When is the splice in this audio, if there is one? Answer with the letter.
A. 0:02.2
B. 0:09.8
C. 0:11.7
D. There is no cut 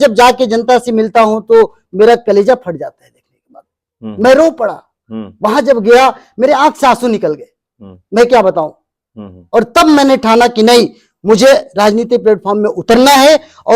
D